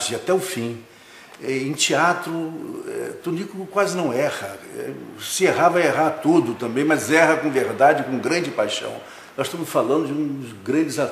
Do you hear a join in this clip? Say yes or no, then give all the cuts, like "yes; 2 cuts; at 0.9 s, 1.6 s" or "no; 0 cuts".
no; 0 cuts